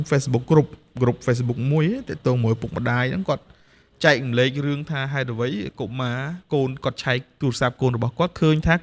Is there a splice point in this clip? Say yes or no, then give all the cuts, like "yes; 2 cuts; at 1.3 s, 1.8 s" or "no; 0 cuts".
no; 0 cuts